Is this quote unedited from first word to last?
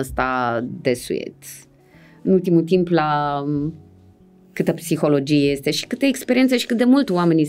yes; 0 cuts

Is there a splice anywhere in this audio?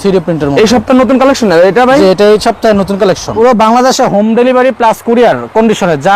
yes; 1 cut; at 3.3 s

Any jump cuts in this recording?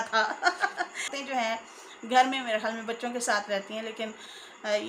yes; 1 cut; at 1.2 s

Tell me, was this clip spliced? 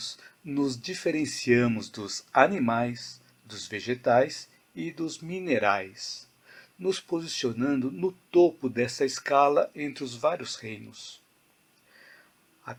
no; 0 cuts

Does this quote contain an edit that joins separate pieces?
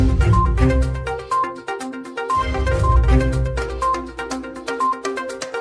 yes; 1 cut; at 2.1 s

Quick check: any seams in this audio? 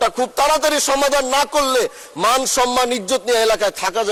no; 0 cuts

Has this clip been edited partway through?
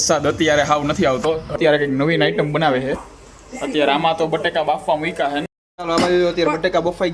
yes; 2 cuts; at 1.6 s, 5.5 s

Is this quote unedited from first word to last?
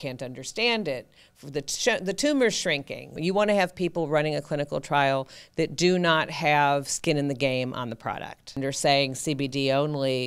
no; 2 cuts; at 3.1 s, 8.6 s

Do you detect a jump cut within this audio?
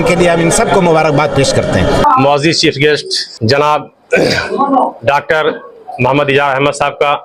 no; 0 cuts

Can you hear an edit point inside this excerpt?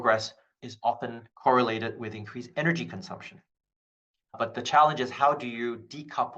no; 0 cuts

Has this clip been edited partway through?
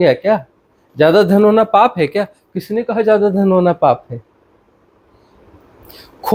no; 0 cuts

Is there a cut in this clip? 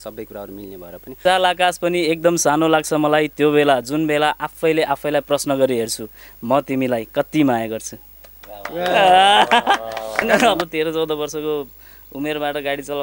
yes; 2 cuts; at 1.2 s, 10.2 s

